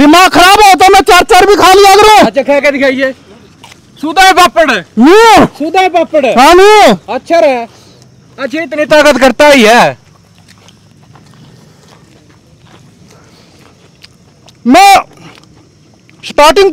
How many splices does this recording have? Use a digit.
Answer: 0